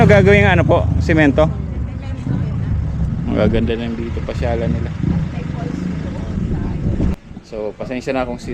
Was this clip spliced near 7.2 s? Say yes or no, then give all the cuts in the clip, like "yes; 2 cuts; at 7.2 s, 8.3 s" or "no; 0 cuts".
yes; 1 cut; at 7.2 s